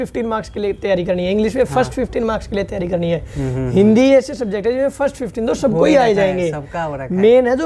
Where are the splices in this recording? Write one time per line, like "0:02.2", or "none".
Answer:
none